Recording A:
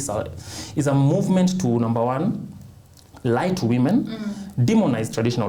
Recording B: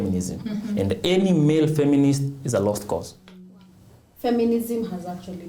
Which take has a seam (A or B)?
B